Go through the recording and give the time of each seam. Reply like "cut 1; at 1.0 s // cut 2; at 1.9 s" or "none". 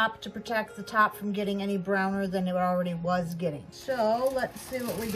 cut 1; at 3.7 s